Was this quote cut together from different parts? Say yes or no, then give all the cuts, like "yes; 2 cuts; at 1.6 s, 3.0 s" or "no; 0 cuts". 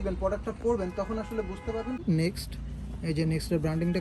yes; 1 cut; at 2.0 s